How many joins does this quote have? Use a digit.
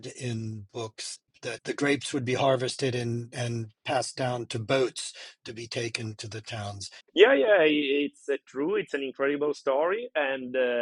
2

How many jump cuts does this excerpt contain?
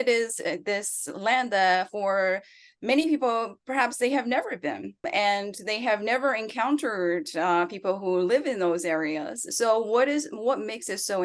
1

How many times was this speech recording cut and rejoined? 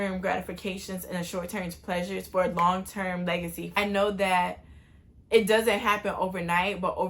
1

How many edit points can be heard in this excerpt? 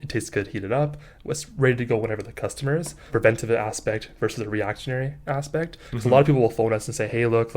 1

